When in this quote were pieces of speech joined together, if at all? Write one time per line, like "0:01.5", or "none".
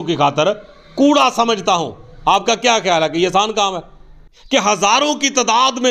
0:04.1

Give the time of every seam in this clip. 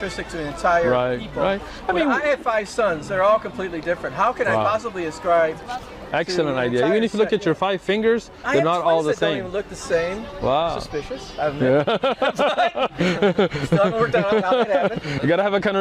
none

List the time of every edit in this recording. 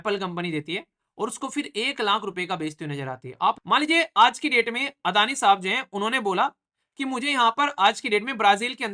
0:03.6

